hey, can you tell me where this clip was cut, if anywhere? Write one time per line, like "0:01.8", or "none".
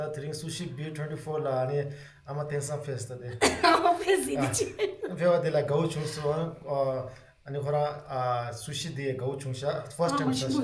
none